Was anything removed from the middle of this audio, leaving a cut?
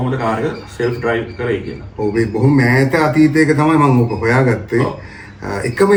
no; 0 cuts

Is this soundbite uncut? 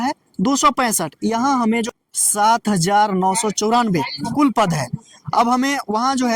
no; 1 cut; at 1.9 s

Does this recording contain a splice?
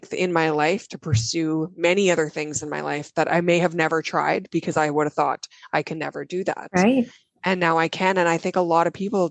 no; 0 cuts

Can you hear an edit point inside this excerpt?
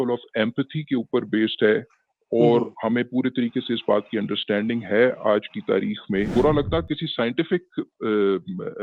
yes; 1 cut; at 6.3 s

